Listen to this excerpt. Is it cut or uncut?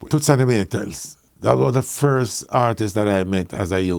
cut